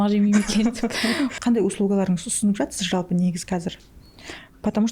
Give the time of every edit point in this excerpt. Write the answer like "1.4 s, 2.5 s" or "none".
1.3 s